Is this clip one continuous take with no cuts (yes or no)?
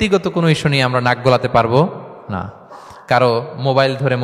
yes